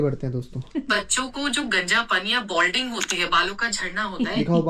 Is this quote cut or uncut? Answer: uncut